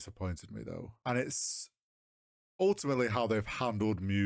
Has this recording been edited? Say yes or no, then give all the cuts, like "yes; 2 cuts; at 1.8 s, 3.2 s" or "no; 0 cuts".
yes; 1 cut; at 0.9 s